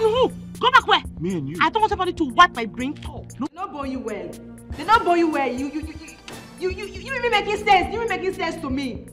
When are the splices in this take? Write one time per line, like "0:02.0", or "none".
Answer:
0:03.5